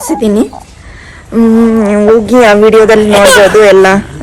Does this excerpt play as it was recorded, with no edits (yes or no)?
yes